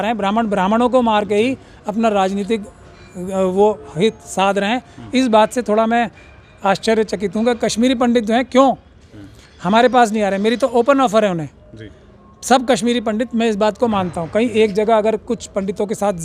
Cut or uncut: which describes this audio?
uncut